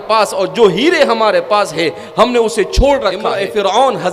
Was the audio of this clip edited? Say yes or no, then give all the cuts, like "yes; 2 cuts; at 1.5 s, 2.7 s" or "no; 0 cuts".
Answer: yes; 1 cut; at 3.1 s